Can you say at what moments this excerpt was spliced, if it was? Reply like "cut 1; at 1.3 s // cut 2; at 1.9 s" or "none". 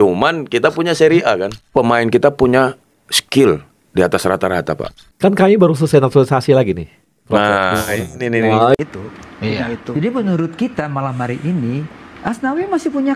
cut 1; at 8.8 s